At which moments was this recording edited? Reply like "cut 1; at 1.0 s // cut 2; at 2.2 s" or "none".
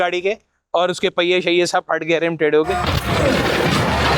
cut 1; at 2.7 s